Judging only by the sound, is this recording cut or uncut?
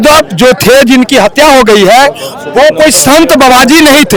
uncut